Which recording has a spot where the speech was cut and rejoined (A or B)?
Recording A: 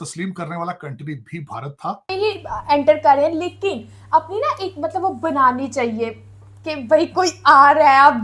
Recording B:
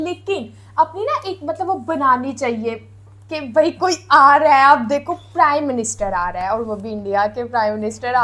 A